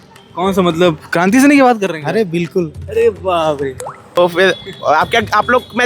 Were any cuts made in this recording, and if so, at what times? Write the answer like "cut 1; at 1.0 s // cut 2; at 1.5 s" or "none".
cut 1; at 4.2 s